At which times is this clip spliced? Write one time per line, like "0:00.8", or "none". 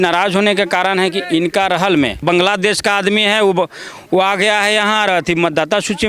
0:02.2